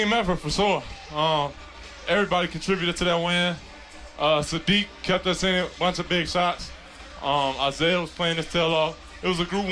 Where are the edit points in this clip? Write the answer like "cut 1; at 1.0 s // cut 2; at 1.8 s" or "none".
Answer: none

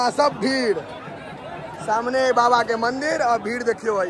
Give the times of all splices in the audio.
none

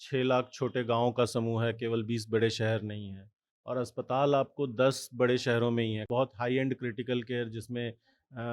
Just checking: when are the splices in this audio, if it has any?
cut 1; at 6.1 s

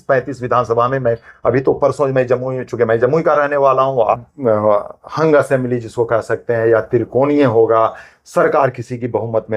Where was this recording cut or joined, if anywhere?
cut 1; at 4.1 s

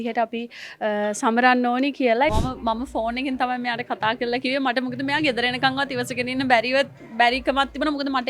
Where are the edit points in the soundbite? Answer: cut 1; at 2.3 s

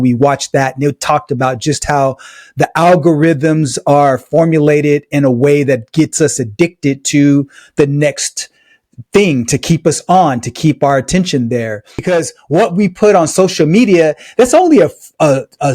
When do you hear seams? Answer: cut 1; at 12.0 s

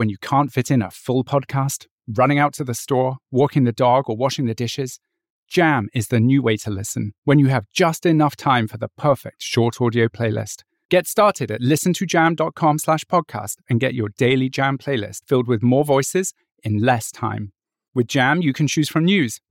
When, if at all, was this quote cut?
none

